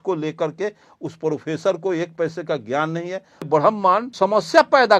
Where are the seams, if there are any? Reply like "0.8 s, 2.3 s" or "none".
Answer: 3.5 s, 4.1 s